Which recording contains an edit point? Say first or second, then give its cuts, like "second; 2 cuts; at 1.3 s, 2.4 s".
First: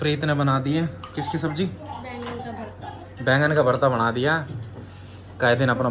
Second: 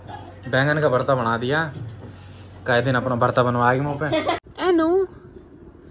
second; 1 cut; at 4.5 s